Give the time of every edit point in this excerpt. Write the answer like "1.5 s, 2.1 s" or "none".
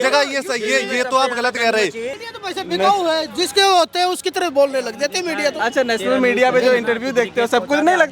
2.1 s